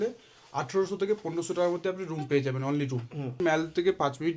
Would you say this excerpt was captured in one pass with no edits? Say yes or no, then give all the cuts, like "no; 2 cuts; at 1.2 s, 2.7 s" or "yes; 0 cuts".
no; 1 cut; at 3.4 s